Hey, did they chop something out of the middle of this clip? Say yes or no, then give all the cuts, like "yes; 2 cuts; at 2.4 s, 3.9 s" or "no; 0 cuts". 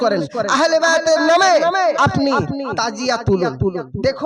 no; 0 cuts